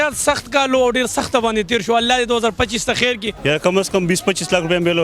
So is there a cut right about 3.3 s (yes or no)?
yes